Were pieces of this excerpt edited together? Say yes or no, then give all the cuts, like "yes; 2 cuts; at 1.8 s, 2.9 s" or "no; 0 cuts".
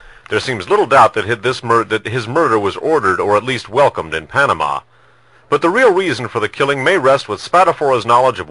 no; 0 cuts